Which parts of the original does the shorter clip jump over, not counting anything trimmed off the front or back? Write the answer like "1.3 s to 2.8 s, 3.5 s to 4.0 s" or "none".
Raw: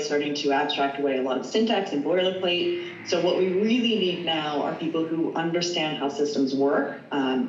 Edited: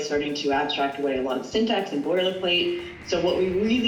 none